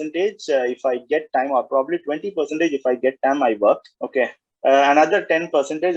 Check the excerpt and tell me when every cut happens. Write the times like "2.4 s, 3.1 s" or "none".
4.0 s